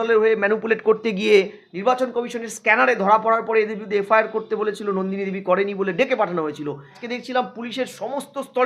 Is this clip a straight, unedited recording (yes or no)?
no